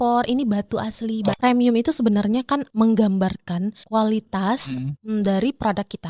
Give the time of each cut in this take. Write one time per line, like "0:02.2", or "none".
0:01.4
0:02.7
0:03.8
0:04.9